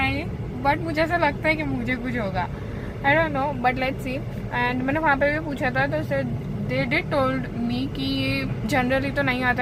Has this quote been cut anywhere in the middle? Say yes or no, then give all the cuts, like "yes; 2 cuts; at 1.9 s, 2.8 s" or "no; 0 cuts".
no; 0 cuts